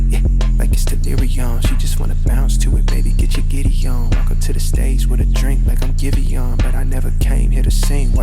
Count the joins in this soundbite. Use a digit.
1